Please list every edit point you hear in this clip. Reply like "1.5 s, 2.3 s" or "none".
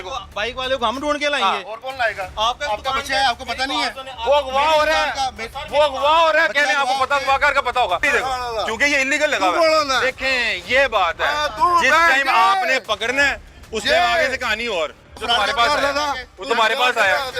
8.0 s, 15.1 s